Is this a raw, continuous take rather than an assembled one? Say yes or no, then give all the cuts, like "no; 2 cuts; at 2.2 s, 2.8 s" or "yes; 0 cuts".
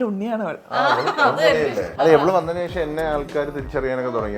no; 1 cut; at 1.9 s